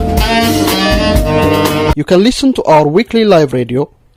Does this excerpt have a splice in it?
no; 0 cuts

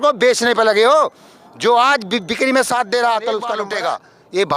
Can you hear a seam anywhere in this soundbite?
yes; 1 cut; at 3.6 s

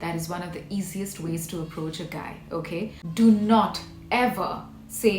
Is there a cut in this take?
yes; 1 cut; at 3.0 s

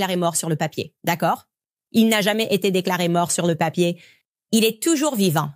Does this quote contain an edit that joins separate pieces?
no; 0 cuts

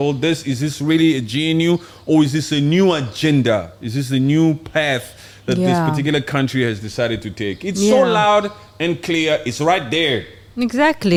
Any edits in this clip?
no; 0 cuts

